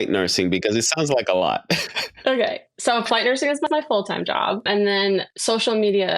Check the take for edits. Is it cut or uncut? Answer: cut